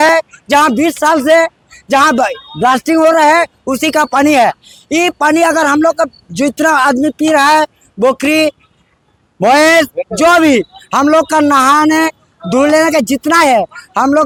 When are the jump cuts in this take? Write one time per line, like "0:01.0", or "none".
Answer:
none